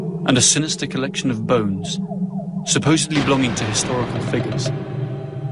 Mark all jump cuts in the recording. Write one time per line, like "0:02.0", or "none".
0:02.9